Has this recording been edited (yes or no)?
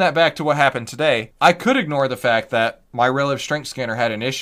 yes